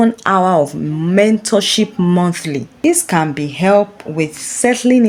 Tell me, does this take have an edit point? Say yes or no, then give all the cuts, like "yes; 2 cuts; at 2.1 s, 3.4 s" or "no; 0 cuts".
no; 0 cuts